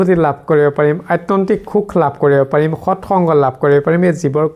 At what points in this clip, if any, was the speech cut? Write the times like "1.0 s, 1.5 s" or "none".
none